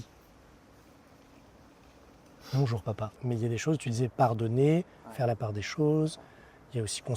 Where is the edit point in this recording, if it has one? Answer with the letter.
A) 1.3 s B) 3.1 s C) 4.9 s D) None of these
B